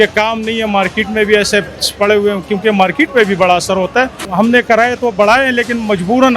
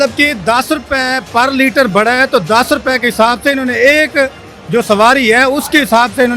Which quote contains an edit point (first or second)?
first